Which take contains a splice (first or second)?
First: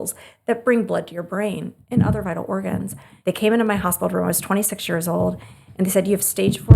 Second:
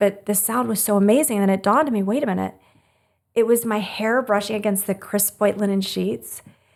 first